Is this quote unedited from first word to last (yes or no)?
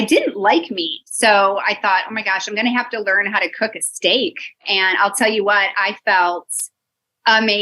no